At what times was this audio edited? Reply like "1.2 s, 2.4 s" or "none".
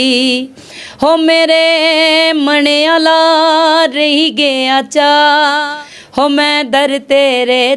5.6 s

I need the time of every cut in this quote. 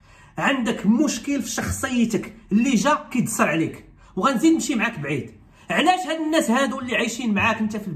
none

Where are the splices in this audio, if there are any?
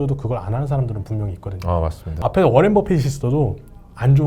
2.1 s

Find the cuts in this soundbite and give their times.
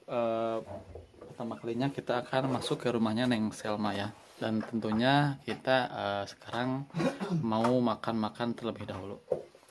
4.3 s

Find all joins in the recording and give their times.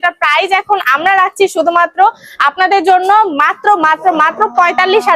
none

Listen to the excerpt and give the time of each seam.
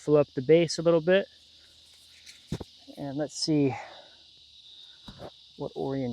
none

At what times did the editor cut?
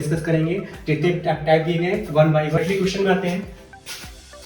2.6 s

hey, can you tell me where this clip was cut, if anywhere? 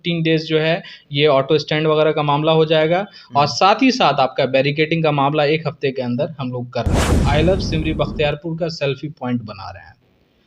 7.2 s

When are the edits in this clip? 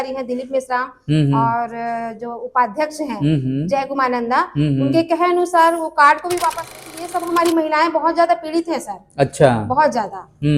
6.7 s

